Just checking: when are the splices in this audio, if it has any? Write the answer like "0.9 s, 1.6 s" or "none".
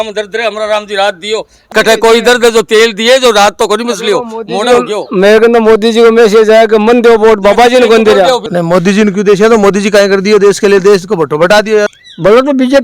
1.6 s, 8.5 s, 12.0 s